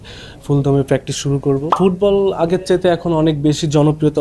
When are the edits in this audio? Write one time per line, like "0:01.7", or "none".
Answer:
0:01.7